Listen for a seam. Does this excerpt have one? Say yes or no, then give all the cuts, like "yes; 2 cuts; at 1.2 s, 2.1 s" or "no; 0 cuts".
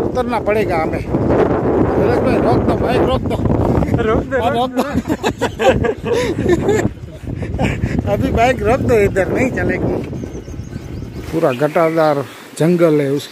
yes; 1 cut; at 11.2 s